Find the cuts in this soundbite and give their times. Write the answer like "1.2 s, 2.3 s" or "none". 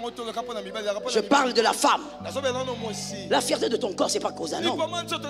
none